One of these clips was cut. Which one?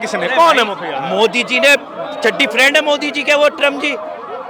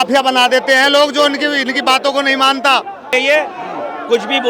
second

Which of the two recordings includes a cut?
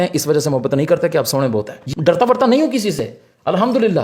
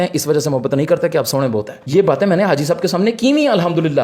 first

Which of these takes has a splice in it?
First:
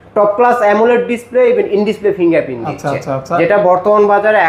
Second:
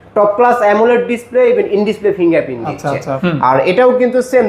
second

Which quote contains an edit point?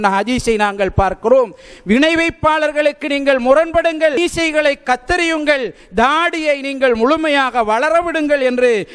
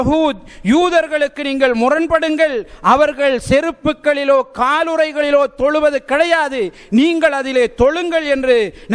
first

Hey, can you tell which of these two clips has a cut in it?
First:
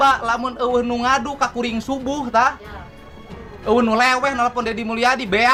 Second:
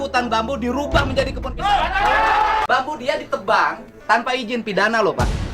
second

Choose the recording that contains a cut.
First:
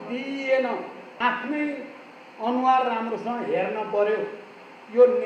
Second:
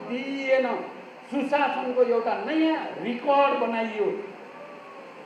first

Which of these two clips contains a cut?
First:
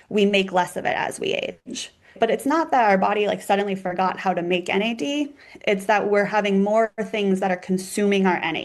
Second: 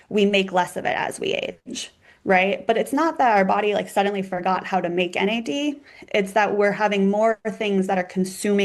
first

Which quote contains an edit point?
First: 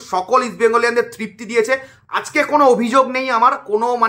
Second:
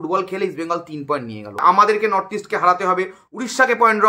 second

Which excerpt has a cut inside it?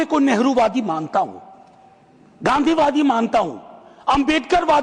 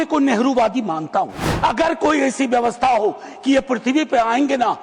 second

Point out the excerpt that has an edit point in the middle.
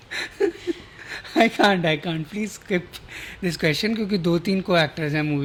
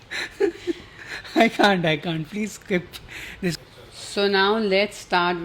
second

